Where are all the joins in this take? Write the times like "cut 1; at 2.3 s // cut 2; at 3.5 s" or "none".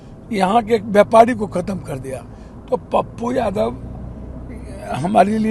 none